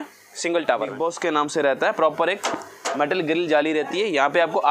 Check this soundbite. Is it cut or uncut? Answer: cut